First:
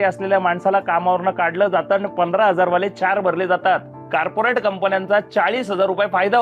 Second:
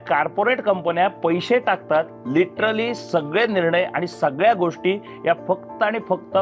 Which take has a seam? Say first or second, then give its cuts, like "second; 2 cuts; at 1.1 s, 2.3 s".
first; 1 cut; at 3.9 s